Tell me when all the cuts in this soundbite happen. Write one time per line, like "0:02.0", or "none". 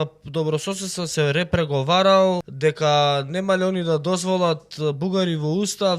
0:02.5